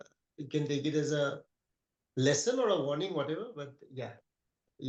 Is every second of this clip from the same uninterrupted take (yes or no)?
yes